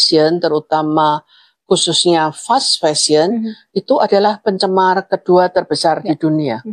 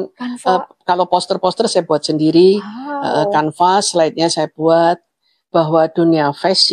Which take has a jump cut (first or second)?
second